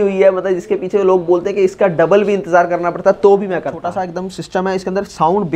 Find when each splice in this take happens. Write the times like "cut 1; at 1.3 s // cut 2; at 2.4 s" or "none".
cut 1; at 3.8 s